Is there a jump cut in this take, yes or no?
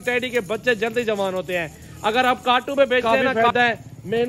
yes